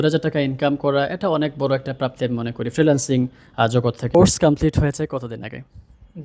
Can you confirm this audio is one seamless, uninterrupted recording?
no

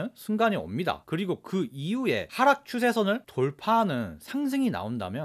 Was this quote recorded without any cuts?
no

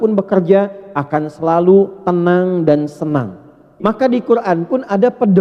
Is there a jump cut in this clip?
yes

